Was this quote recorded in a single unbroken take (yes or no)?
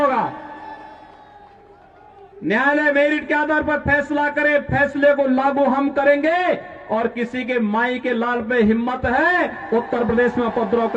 yes